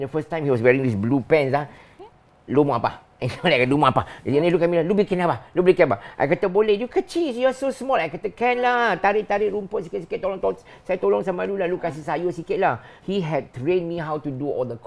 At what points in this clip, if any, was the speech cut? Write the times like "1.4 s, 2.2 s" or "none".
none